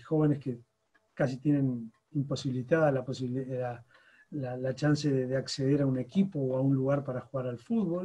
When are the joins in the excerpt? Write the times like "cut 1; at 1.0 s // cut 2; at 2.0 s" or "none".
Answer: none